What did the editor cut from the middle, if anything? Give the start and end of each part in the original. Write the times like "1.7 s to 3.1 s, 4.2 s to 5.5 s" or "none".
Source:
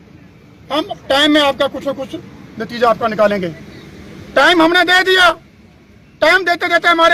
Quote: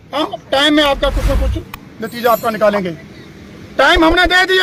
none